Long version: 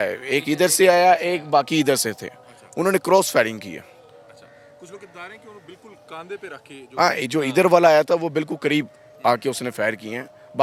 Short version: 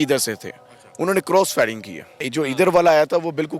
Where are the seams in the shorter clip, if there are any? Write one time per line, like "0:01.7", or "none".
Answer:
0:02.2